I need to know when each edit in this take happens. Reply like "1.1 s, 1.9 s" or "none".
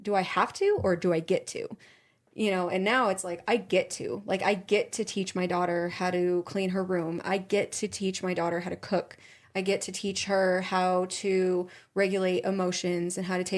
none

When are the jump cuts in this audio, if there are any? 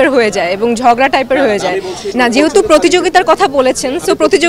2.0 s

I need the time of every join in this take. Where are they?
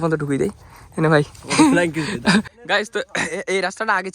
2.6 s

